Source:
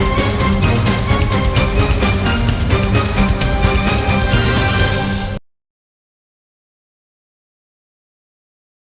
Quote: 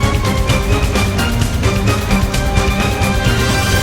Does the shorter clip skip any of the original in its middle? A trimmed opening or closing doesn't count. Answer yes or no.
no